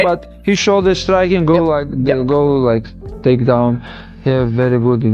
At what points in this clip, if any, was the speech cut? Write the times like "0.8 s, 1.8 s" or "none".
3.8 s

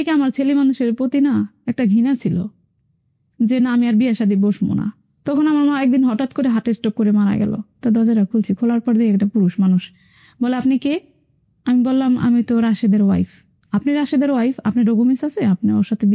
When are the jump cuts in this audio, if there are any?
5.1 s, 7.6 s

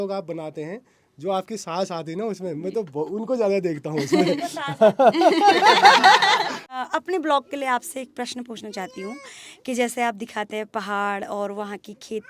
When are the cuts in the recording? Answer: 6.6 s

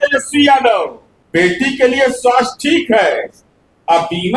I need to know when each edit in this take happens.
1.3 s

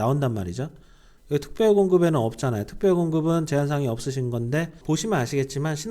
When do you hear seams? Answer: 4.7 s

